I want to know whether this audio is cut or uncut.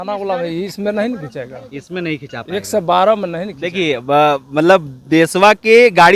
uncut